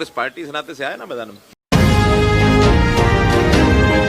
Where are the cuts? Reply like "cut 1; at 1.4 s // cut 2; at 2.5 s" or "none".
cut 1; at 1.6 s